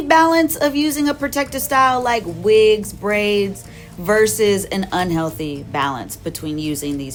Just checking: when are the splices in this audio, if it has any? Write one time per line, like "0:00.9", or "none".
none

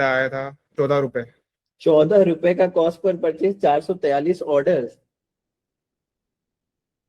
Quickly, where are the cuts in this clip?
none

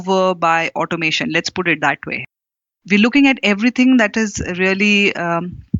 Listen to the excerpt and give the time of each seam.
0:02.6

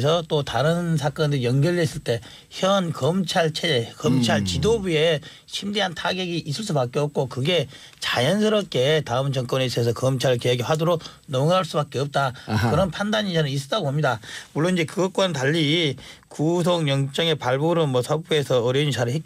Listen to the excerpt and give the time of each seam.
0:13.3

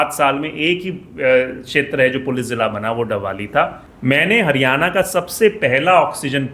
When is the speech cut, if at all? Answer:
0:03.9

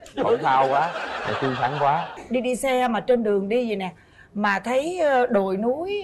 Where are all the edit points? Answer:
0:02.1

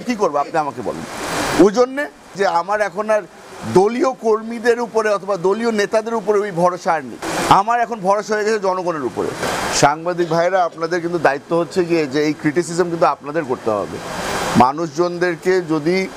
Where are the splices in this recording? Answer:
0:02.3
0:07.2
0:09.4

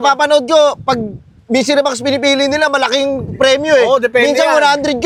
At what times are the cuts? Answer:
none

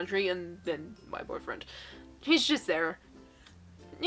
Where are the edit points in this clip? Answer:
none

